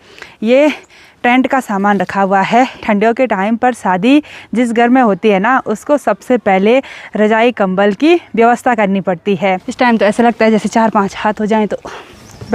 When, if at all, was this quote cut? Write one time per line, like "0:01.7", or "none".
0:02.8
0:09.7